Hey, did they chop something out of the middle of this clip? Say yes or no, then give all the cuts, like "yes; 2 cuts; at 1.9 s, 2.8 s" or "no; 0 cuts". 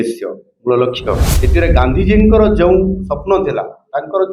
yes; 1 cut; at 1.3 s